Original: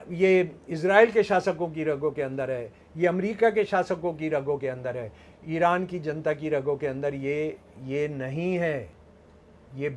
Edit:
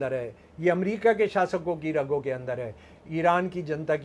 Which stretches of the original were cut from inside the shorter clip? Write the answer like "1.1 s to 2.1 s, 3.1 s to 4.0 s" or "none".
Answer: none